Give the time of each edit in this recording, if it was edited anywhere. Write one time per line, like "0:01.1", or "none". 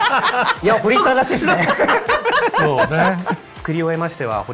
0:03.4